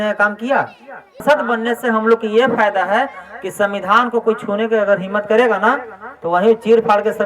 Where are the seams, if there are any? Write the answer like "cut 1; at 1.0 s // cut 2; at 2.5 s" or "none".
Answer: cut 1; at 1.2 s